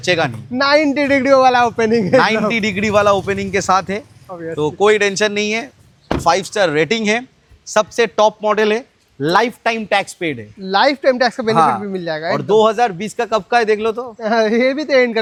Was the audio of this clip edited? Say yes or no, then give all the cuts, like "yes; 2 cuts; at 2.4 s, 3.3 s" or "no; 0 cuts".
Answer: no; 0 cuts